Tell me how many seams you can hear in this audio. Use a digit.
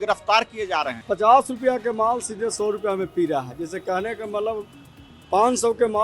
1